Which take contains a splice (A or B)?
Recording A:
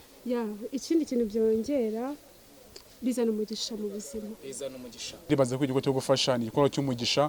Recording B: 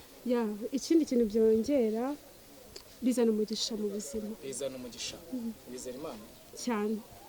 A